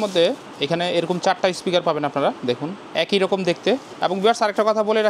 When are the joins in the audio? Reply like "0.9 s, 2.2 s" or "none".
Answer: 2.8 s, 3.9 s

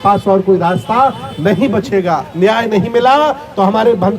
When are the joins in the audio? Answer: 2.3 s

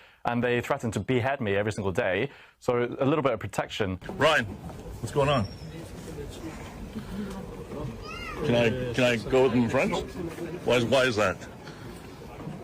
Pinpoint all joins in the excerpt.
4.0 s

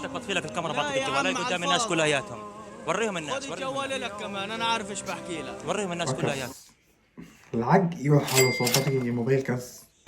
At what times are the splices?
6.2 s

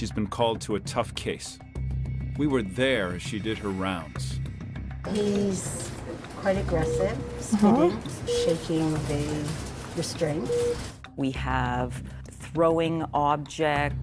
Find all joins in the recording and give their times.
5.4 s

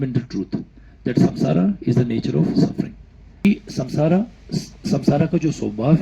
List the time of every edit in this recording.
3.4 s

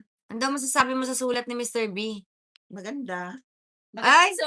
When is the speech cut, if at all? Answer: none

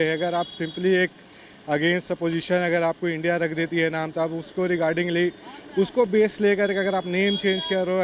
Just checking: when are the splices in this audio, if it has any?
none

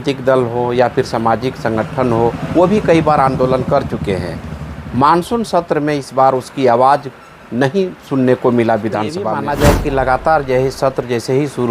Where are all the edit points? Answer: 9.4 s

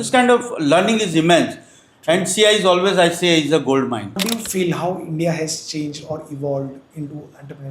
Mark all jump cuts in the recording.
4.2 s

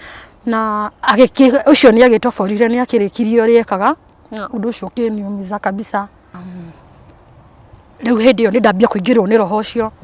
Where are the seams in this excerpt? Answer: 6.4 s

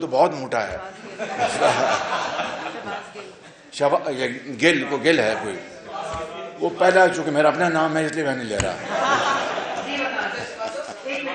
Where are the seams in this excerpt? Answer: none

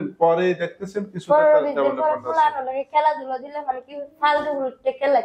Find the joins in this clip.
none

